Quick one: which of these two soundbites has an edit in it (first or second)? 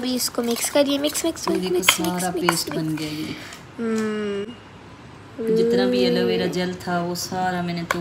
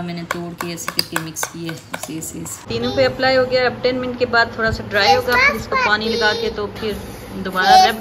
second